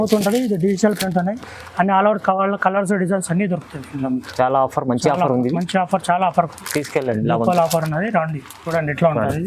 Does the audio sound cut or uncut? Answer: uncut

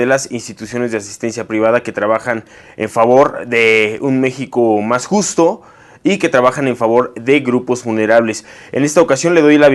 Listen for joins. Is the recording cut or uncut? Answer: uncut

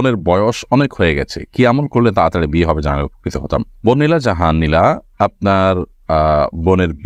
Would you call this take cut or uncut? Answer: uncut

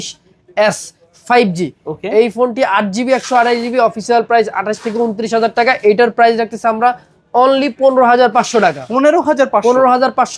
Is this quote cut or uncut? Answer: uncut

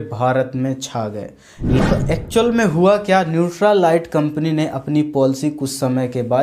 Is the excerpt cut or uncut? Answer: cut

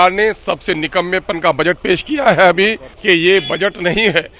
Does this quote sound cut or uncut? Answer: cut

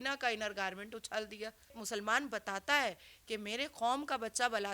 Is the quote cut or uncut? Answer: cut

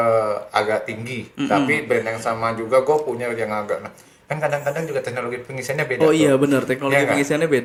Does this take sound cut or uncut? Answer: uncut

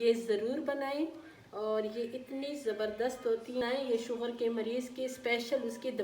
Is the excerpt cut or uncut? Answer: cut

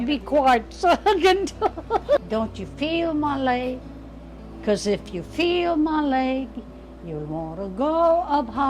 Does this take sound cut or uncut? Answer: cut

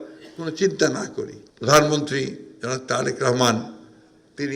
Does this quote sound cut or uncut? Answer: cut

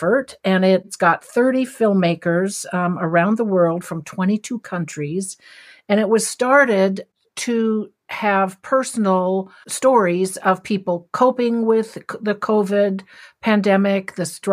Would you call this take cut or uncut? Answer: cut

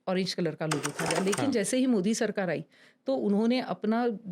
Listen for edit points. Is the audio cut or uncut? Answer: cut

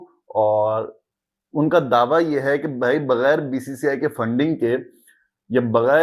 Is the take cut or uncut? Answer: uncut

